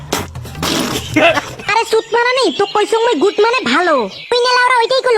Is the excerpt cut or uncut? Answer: cut